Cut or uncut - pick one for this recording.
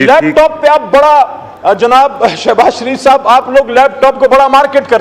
uncut